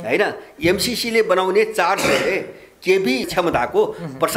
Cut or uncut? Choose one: cut